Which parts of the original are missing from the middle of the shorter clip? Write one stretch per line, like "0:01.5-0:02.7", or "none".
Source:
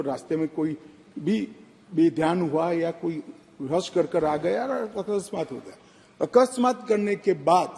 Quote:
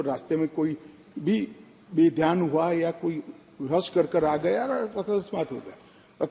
none